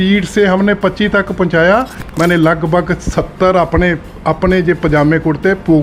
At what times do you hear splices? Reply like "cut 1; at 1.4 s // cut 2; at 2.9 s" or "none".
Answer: cut 1; at 2.0 s